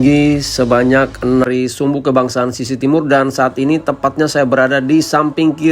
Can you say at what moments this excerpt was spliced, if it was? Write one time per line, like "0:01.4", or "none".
0:01.5